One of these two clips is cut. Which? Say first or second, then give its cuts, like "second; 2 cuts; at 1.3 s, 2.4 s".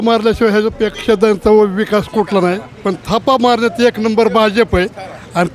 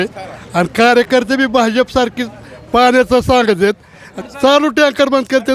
second; 1 cut; at 4.2 s